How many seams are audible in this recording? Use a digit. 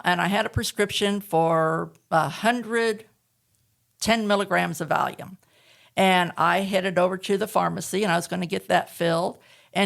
0